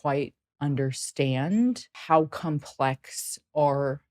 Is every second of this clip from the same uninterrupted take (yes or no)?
no